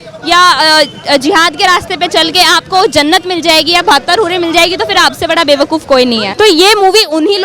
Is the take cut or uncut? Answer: cut